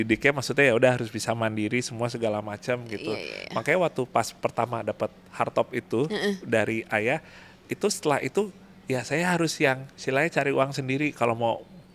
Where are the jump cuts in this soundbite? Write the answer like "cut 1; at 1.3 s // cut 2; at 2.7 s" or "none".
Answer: none